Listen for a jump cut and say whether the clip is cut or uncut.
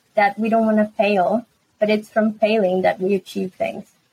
uncut